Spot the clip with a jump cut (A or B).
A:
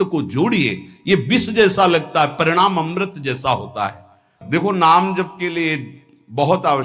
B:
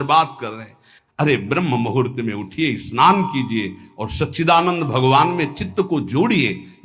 A